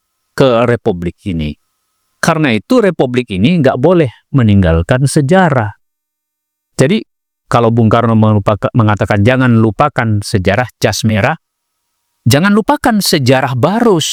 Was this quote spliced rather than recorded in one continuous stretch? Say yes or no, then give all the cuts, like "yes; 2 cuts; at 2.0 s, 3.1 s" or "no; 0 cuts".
no; 0 cuts